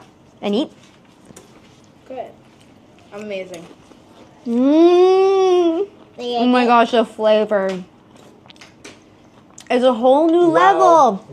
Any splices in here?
no; 0 cuts

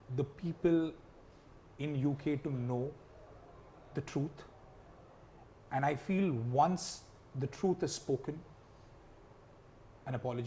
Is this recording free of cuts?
yes; 0 cuts

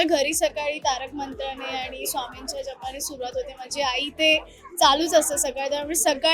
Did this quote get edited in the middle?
no; 0 cuts

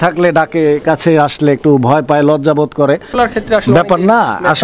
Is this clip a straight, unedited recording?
no; 1 cut; at 3.1 s

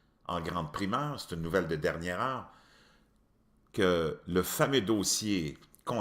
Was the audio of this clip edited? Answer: yes; 1 cut; at 2.8 s

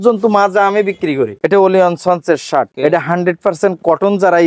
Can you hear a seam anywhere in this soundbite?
yes; 2 cuts; at 1.3 s, 2.7 s

